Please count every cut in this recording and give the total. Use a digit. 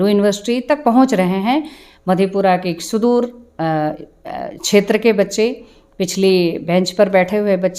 0